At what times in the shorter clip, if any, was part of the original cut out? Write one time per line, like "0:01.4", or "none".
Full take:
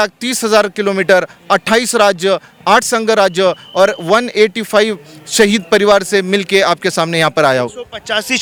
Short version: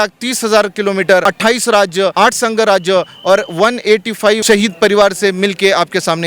0:01.2
0:02.1
0:04.4